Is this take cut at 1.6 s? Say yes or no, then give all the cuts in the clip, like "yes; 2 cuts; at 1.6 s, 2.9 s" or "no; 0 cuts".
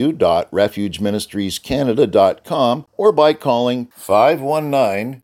no; 1 cut; at 2.9 s